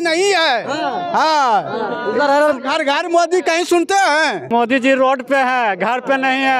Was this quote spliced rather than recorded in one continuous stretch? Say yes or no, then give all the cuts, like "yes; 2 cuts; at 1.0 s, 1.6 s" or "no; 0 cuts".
yes; 1 cut; at 4.5 s